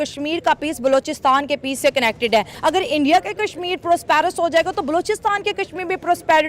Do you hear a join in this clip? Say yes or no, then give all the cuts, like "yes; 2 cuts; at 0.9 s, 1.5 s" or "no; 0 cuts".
yes; 1 cut; at 2.5 s